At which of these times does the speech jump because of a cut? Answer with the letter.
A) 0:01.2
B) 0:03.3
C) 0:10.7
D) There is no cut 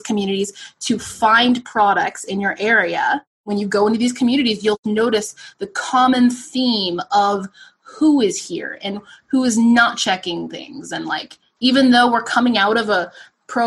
B